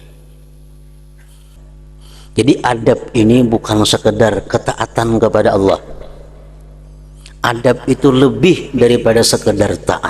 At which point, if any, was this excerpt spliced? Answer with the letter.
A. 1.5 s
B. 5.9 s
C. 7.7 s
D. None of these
A